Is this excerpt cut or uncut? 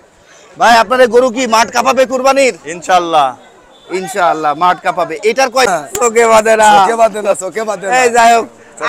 cut